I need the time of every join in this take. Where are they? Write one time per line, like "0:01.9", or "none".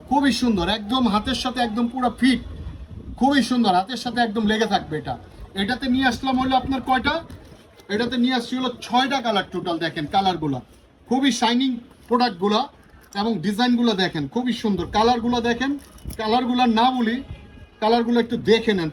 none